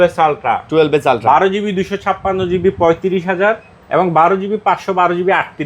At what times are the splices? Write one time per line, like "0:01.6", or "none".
none